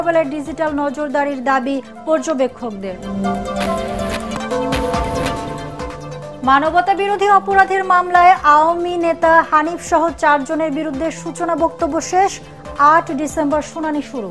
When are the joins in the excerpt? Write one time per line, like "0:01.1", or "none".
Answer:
0:04.4